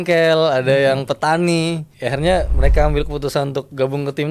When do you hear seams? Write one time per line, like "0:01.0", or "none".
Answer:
0:01.9